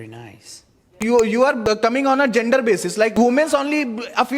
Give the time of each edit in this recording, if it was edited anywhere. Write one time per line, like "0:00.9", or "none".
0:01.0
0:01.7
0:03.1